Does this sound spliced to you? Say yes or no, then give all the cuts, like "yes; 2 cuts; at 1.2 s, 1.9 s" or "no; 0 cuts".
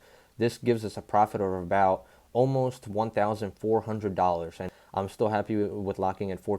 yes; 1 cut; at 4.7 s